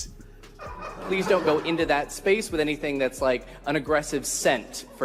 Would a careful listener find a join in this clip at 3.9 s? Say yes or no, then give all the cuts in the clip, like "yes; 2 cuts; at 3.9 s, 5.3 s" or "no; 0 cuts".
no; 0 cuts